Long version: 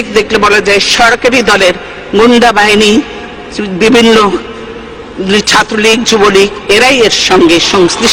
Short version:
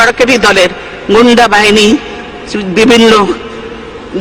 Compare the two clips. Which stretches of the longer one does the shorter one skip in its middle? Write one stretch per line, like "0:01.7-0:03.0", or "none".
none